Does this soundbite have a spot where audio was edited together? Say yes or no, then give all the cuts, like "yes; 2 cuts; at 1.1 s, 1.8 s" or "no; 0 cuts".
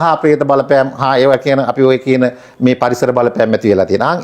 no; 0 cuts